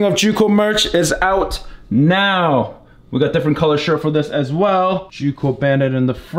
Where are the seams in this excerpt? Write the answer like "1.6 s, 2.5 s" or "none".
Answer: 5.1 s